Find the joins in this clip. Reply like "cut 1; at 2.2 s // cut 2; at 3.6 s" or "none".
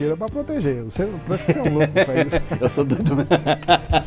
none